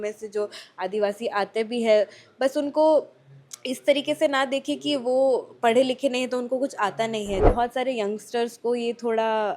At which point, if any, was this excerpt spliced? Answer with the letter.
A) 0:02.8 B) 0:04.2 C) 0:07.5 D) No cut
C